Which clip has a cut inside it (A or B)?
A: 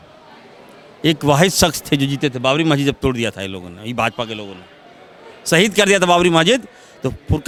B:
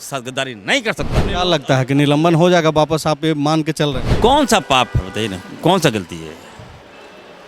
B